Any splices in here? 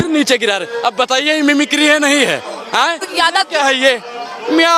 yes; 1 cut; at 3.1 s

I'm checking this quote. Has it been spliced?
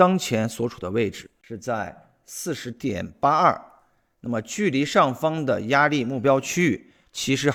no; 0 cuts

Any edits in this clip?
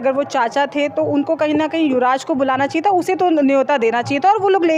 no; 0 cuts

